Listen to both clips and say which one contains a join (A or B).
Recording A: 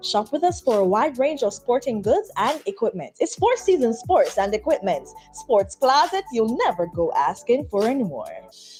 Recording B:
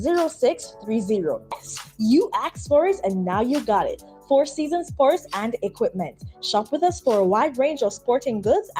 B